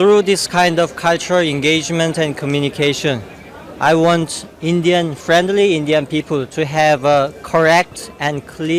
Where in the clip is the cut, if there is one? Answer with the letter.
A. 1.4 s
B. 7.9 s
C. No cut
C